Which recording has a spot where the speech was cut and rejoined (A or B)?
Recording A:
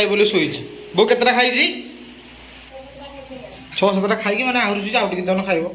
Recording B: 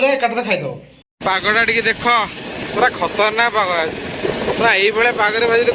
B